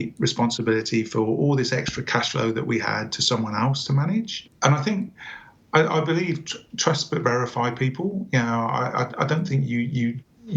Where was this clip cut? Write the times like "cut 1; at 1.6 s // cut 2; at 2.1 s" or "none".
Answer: cut 1; at 4.4 s